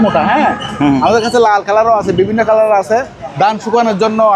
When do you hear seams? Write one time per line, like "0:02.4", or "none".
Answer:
0:03.2